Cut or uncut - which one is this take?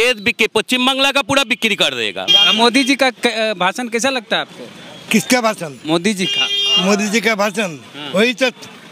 cut